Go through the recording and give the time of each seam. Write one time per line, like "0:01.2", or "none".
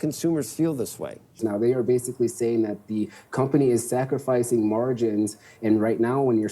0:01.4